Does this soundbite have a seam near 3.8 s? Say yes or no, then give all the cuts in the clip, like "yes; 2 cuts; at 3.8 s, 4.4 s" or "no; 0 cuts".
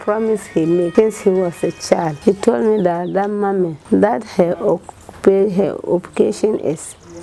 yes; 3 cuts; at 0.9 s, 2.1 s, 3.8 s